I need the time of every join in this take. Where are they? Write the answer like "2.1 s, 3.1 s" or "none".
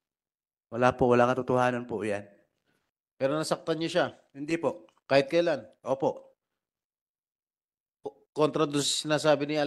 none

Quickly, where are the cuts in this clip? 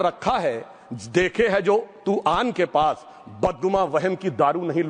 none

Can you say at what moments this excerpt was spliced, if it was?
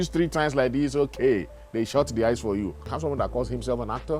2.8 s

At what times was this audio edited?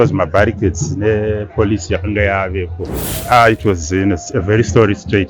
3.1 s

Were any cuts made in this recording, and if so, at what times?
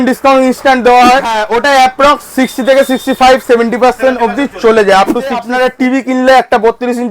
1.4 s, 5.5 s

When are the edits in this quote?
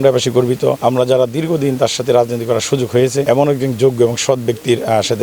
0.8 s, 3.2 s

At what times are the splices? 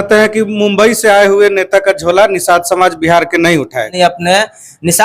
3.9 s

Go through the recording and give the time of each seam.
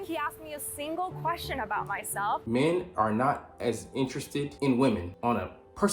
2.4 s, 4.5 s, 5.1 s

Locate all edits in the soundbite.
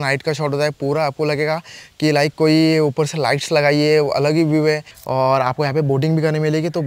4.9 s

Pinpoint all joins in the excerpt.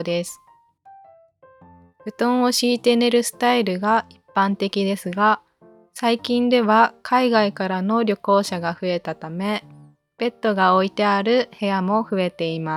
none

